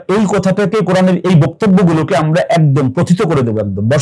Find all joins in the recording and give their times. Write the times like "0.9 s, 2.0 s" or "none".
none

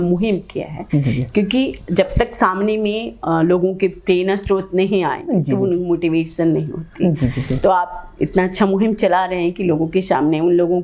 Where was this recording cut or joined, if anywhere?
none

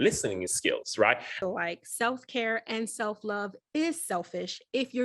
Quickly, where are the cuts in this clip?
1.4 s

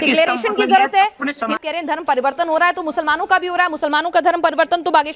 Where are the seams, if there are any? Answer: 1.6 s

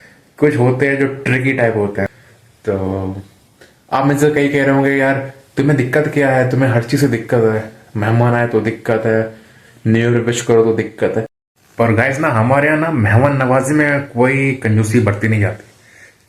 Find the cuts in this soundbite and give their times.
2.1 s, 11.4 s

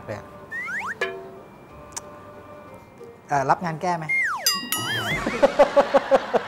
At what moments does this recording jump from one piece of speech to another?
none

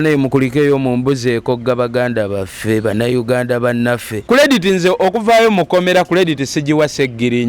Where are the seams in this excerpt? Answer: 4.2 s

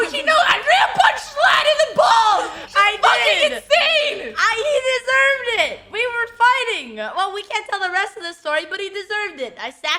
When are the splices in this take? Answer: none

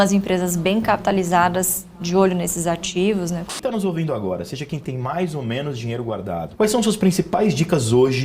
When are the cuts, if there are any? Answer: 3.5 s, 6.5 s

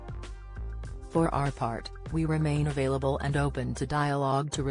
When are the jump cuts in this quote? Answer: 1.1 s

